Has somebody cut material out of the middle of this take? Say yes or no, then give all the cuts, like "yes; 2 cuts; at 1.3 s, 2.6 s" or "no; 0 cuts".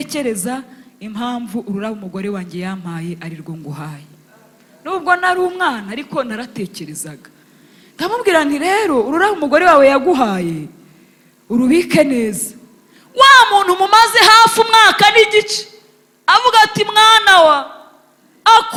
no; 0 cuts